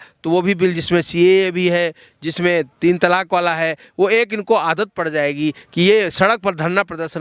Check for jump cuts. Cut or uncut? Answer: uncut